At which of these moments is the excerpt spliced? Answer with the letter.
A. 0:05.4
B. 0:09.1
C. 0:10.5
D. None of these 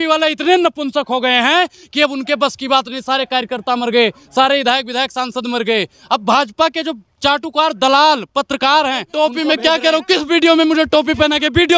B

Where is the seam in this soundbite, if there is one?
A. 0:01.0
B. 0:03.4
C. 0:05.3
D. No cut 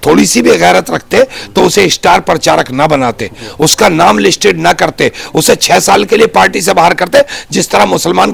D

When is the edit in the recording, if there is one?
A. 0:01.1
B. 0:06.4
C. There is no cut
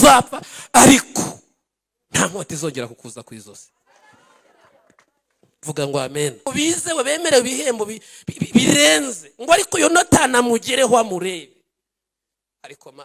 B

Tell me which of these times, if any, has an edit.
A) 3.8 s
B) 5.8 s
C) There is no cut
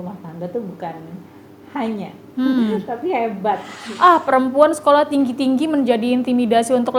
A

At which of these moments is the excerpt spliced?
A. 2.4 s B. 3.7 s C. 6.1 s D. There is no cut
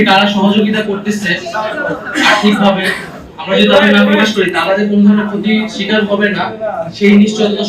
D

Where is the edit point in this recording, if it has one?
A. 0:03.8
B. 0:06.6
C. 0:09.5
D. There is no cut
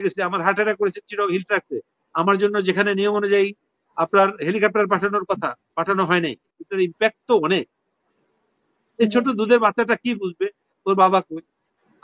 B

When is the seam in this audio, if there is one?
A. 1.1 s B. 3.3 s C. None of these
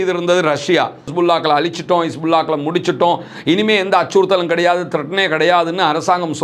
A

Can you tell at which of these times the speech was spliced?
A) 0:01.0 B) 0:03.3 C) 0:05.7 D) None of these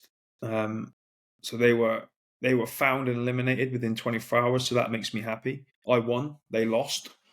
C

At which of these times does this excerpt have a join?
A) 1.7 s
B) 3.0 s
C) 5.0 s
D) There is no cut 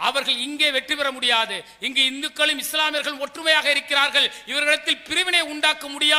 D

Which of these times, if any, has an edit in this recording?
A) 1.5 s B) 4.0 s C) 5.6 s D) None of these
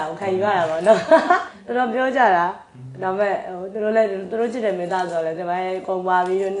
A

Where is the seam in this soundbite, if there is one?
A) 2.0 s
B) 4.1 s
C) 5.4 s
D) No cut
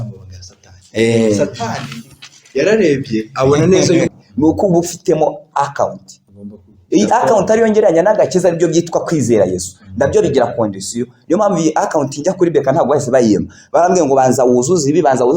B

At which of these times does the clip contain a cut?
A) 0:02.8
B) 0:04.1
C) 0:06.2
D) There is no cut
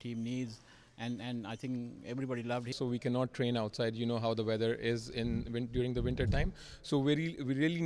A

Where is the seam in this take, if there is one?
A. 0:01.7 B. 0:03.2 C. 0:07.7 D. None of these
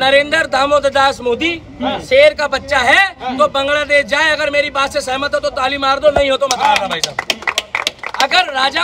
D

